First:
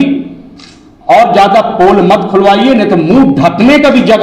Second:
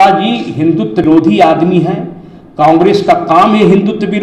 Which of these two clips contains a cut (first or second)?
second